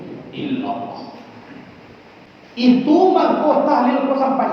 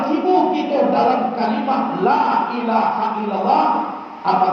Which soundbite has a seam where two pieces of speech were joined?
first; 1 cut; at 2.3 s

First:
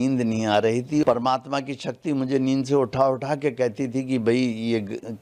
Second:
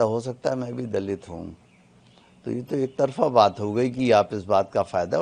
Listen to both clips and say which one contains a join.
first; 1 cut; at 1.0 s

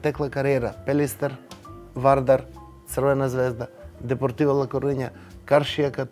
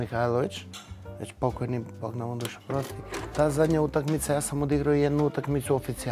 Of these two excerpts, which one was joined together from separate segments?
second; 1 cut; at 3.2 s

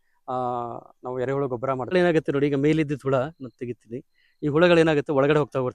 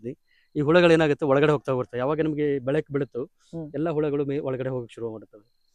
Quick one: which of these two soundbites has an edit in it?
first; 1 cut; at 1.9 s

